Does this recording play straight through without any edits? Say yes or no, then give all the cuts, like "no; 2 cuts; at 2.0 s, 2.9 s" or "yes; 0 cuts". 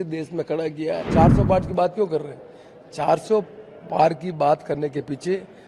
no; 1 cut; at 1.1 s